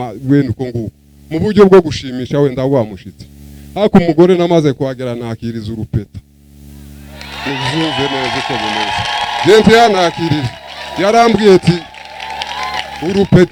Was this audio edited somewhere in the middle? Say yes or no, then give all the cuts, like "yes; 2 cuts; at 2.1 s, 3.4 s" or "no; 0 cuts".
no; 0 cuts